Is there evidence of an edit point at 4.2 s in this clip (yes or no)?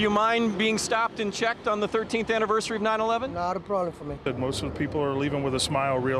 yes